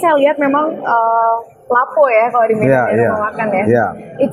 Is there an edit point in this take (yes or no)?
no